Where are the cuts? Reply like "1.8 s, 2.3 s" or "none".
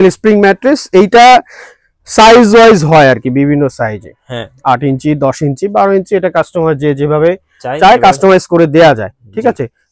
none